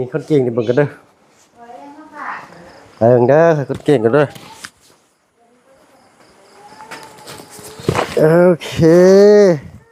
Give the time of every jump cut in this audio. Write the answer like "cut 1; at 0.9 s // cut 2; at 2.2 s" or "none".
none